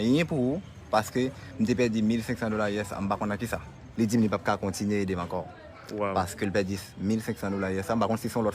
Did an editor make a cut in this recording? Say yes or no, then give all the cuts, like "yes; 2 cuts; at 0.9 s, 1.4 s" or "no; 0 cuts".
yes; 1 cut; at 3.8 s